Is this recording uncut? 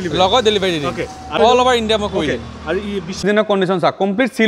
no; 2 cuts; at 1.4 s, 3.2 s

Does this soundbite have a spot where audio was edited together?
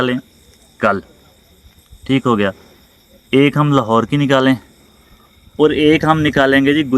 no; 0 cuts

